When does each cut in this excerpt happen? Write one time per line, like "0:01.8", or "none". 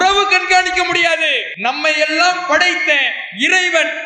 0:01.4

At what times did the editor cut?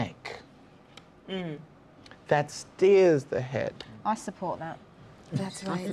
0:01.6

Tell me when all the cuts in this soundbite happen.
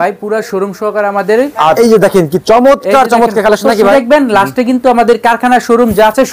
0:01.8
0:03.9

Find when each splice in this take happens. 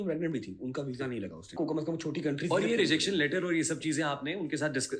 0:01.5

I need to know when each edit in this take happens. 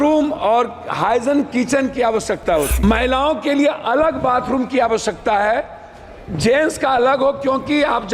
0:02.8

